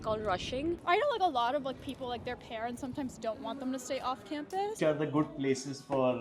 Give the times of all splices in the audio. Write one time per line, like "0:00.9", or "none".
0:00.8
0:04.8